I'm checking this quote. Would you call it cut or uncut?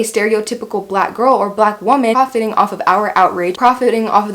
cut